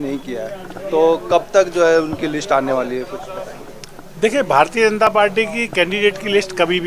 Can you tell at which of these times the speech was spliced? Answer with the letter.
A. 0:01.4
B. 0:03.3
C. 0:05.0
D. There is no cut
D